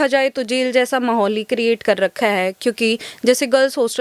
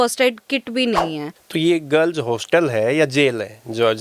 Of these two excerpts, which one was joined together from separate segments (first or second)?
second